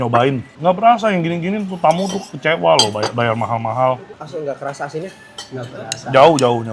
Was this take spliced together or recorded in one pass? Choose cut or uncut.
cut